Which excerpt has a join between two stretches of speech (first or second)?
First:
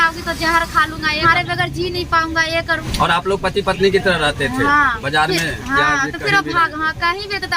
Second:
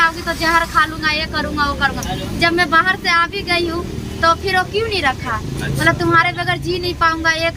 first